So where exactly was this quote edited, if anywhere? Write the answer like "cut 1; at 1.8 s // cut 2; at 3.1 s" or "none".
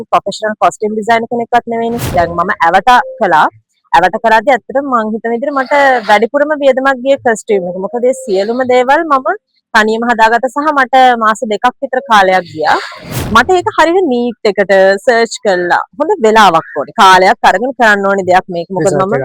cut 1; at 2.1 s // cut 2; at 13.1 s